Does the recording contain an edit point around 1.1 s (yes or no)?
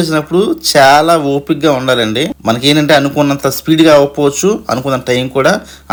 no